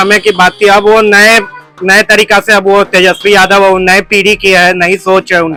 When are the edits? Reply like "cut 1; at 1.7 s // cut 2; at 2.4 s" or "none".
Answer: none